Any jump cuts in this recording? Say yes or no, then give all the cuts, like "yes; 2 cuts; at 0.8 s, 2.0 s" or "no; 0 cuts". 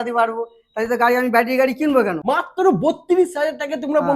yes; 1 cut; at 2.2 s